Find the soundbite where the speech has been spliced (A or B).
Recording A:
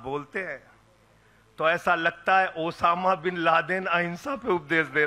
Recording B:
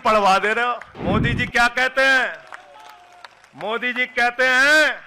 B